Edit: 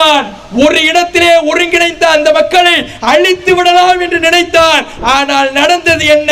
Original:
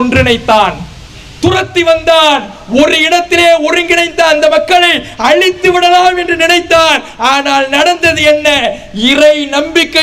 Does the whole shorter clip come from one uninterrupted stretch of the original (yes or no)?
yes